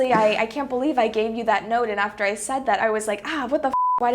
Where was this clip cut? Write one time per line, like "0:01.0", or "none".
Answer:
0:02.8